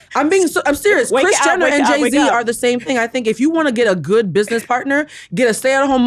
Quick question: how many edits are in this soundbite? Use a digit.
0